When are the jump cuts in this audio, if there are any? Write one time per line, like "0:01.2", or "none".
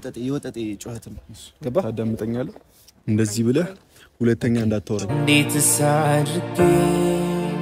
0:05.1